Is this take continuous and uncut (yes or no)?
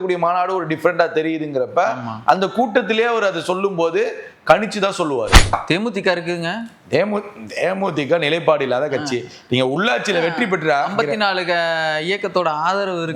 no